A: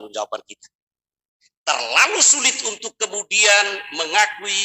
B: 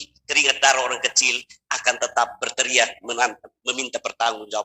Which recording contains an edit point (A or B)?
A